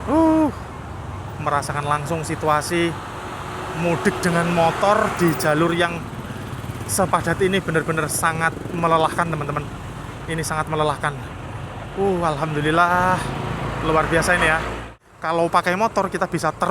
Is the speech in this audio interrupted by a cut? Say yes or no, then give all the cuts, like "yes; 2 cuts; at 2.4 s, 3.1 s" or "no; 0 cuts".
yes; 1 cut; at 14.9 s